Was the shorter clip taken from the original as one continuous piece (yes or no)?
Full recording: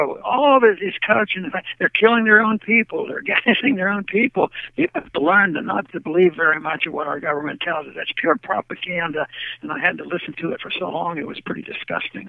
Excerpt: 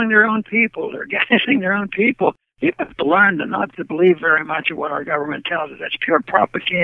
yes